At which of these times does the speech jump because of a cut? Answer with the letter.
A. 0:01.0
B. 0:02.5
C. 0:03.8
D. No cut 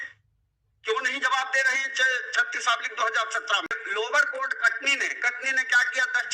C